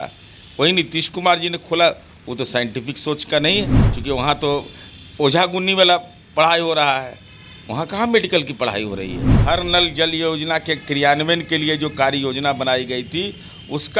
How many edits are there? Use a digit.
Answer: 2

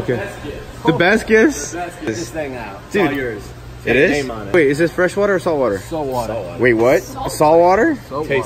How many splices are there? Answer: 2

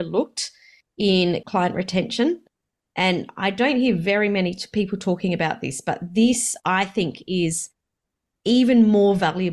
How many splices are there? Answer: 1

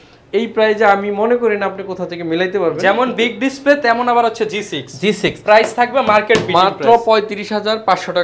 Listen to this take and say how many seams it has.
0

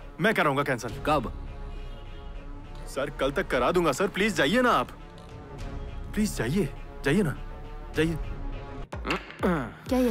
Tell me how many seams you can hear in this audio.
1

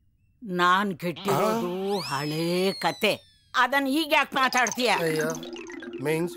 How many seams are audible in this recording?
0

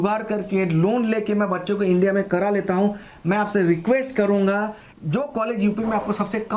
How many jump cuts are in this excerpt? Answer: 0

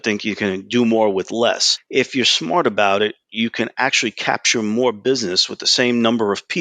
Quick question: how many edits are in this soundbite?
1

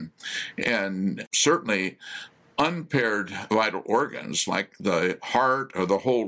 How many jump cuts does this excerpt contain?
1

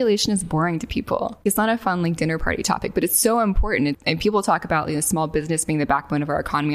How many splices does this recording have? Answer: 2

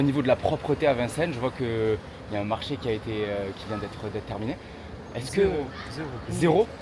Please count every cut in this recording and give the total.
0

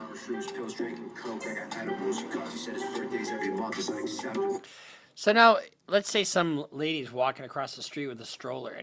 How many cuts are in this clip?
0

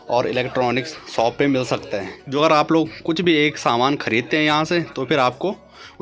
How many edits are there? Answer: 1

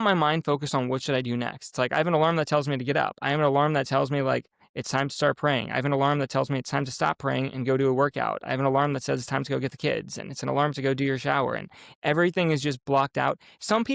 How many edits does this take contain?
0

